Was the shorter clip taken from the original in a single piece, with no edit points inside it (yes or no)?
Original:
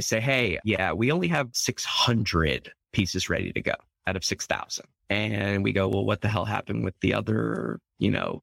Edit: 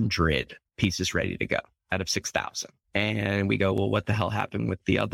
yes